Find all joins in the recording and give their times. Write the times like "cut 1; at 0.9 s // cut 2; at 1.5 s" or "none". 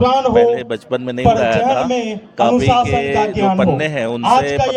none